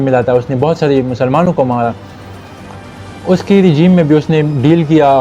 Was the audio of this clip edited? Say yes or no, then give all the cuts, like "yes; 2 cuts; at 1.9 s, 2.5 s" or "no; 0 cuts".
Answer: no; 0 cuts